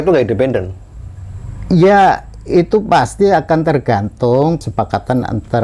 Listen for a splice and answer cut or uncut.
cut